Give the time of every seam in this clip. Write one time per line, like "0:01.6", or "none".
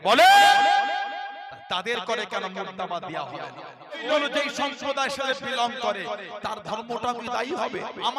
0:04.0